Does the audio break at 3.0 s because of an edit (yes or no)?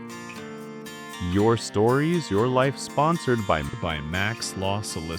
no